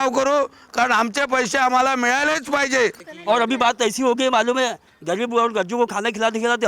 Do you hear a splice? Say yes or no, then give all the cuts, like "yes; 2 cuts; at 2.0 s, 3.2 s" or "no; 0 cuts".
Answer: yes; 1 cut; at 3.1 s